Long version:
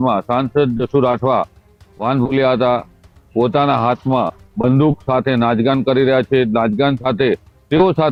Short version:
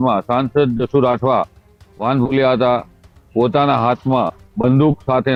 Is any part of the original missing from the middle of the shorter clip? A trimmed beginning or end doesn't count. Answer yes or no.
no